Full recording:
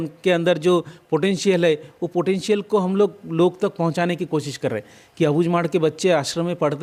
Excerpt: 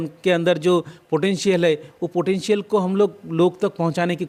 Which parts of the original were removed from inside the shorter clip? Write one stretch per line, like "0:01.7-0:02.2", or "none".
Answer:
none